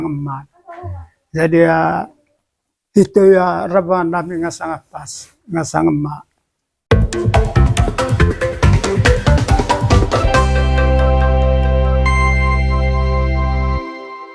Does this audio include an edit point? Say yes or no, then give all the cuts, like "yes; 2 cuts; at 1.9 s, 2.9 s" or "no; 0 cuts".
yes; 1 cut; at 6.7 s